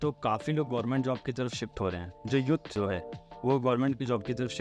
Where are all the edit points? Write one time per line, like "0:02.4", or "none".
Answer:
0:02.7